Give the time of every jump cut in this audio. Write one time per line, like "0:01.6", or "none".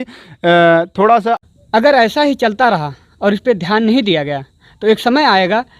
0:01.4